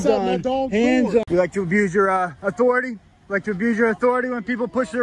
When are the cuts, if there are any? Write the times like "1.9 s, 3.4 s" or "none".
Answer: 1.3 s